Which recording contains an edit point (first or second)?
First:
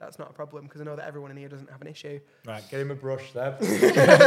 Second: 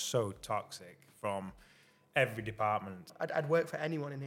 second